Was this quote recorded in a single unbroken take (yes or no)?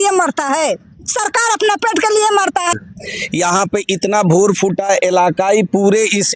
no